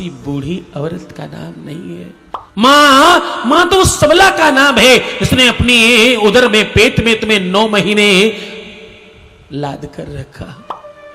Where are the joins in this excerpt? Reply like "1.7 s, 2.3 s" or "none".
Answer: 2.5 s